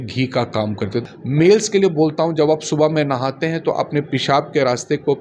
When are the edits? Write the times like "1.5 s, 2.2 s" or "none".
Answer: 1.0 s